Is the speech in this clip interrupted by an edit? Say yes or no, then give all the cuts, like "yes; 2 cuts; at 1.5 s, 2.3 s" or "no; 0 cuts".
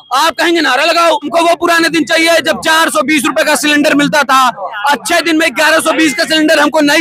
yes; 1 cut; at 1.3 s